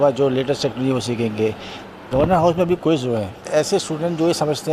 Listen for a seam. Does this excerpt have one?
yes; 1 cut; at 1.9 s

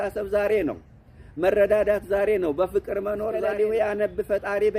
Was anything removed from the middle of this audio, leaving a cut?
yes; 1 cut; at 3.4 s

